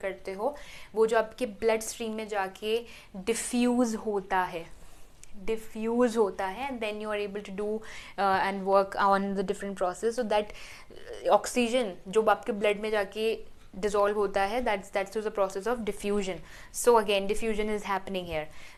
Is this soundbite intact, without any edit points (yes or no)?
yes